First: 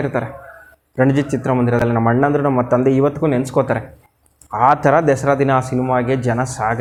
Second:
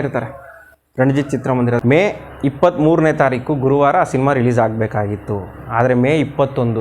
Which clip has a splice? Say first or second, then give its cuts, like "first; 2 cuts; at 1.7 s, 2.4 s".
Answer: second; 1 cut; at 1.8 s